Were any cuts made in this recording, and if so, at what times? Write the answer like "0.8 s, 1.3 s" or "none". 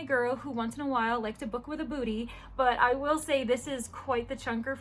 none